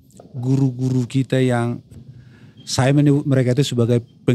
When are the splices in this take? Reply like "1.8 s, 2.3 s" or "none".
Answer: 1.9 s